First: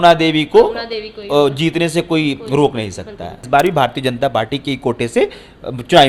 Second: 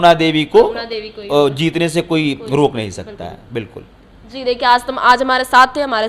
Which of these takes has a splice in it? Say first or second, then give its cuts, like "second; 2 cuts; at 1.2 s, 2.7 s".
first; 1 cut; at 3.4 s